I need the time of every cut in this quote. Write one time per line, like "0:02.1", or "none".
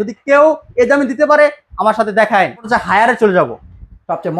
0:02.7